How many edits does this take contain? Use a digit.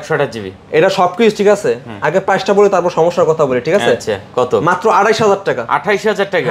0